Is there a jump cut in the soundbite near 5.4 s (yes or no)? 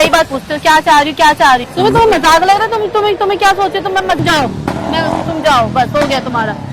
no